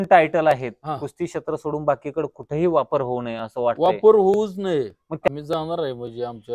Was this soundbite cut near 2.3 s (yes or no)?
no